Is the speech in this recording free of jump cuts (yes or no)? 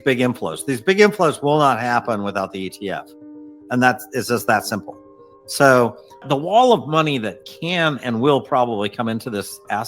no